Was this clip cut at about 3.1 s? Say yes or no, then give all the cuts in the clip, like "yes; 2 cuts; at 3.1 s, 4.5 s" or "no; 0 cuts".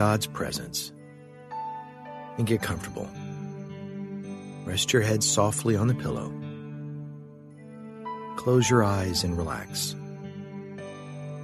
yes; 4 cuts; at 3.1 s, 4.6 s, 6.2 s, 8.0 s